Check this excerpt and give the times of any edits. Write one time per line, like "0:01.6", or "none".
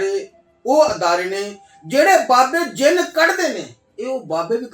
none